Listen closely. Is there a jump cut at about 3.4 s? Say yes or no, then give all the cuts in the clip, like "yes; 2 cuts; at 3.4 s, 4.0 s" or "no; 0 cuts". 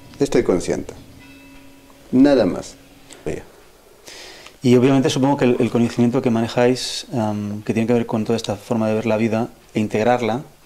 yes; 1 cut; at 3.4 s